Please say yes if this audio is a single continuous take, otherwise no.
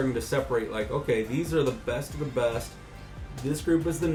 yes